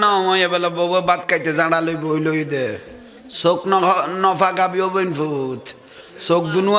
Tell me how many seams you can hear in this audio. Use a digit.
0